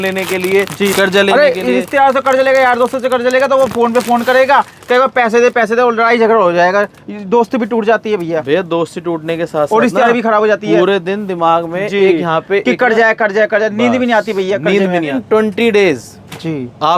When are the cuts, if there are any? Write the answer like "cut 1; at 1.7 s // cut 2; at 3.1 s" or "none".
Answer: cut 1; at 15.2 s